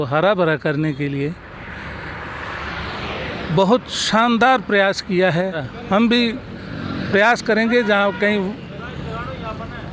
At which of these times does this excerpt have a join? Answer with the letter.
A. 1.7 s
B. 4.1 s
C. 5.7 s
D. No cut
C